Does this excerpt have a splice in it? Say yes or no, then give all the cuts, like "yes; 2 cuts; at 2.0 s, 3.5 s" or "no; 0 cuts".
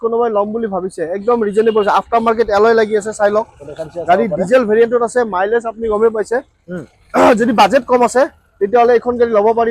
no; 0 cuts